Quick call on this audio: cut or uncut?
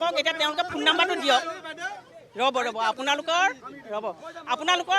uncut